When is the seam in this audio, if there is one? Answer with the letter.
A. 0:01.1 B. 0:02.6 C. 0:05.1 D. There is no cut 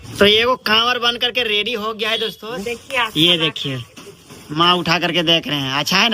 B